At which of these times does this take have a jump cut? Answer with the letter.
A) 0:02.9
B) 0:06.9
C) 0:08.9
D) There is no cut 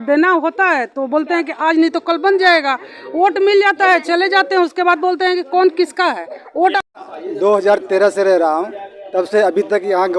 B